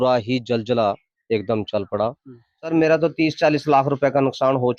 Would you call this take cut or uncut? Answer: cut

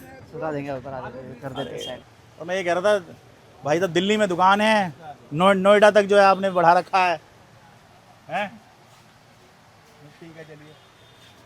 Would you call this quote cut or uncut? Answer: cut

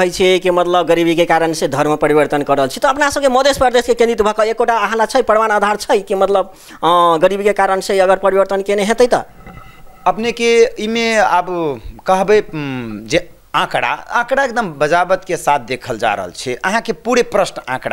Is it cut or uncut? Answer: uncut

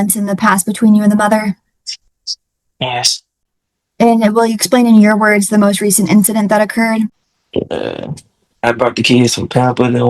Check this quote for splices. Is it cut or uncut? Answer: cut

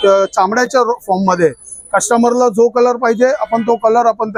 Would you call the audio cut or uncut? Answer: uncut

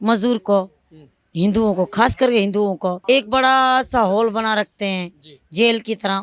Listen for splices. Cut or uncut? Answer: cut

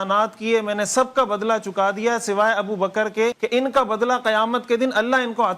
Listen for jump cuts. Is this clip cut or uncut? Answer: cut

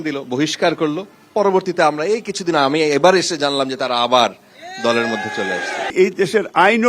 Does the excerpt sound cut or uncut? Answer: cut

